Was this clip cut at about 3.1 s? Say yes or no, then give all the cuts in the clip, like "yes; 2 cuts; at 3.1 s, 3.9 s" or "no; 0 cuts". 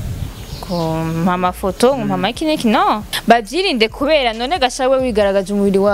yes; 1 cut; at 3.1 s